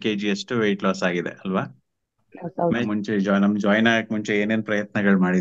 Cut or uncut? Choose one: cut